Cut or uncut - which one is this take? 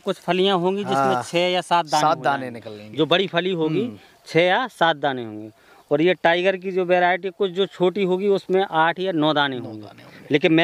uncut